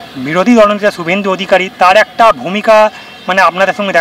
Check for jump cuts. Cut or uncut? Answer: uncut